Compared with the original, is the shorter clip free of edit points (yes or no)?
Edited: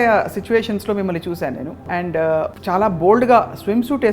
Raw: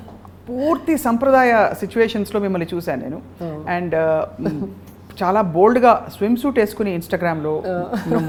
no